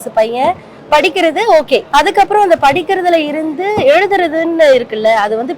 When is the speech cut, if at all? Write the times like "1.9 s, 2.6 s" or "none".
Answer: 1.9 s